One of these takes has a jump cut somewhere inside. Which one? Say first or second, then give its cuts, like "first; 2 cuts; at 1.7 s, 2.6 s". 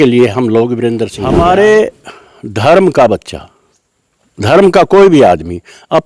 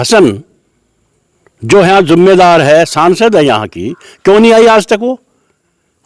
first; 1 cut; at 1.1 s